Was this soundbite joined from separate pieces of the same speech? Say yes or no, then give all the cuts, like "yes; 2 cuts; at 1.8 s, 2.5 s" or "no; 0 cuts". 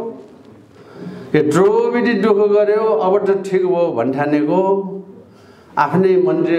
no; 0 cuts